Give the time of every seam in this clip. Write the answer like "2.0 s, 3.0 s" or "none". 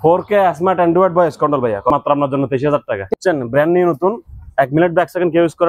1.9 s, 3.1 s